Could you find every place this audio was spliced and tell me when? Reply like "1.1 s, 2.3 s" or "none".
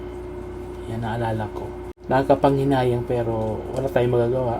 2.0 s